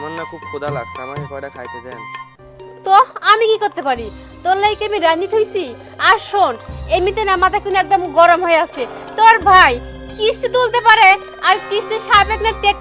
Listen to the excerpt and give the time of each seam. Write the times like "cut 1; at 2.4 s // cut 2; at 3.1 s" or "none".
none